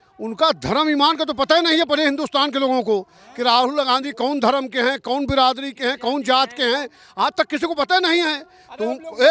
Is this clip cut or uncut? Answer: uncut